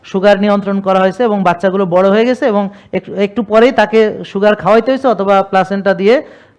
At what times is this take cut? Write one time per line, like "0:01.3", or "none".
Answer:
none

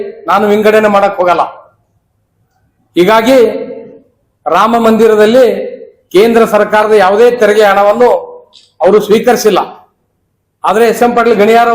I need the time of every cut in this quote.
none

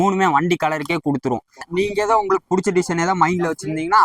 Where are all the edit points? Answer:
0:01.7

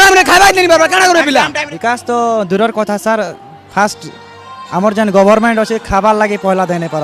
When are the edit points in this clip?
0:01.6

